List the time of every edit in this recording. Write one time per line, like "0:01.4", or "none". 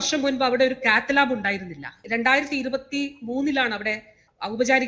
0:02.0